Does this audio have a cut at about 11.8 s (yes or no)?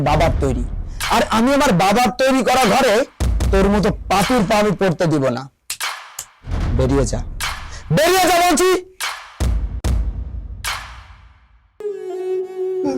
yes